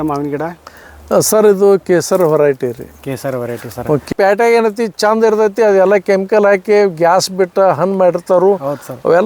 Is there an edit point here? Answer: yes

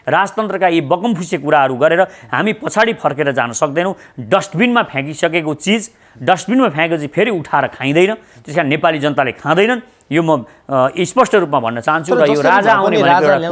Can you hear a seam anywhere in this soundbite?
no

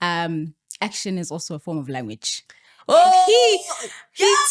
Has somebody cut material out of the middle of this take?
no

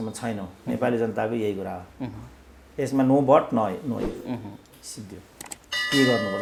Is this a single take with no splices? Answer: yes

